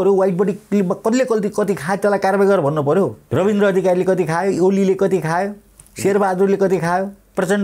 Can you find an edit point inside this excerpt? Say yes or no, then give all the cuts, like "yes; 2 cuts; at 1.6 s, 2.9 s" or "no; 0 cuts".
yes; 1 cut; at 3.2 s